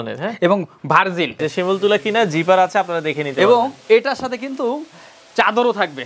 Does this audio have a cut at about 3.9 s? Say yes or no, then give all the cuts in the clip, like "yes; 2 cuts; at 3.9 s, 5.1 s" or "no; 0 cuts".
no; 1 cut; at 1.4 s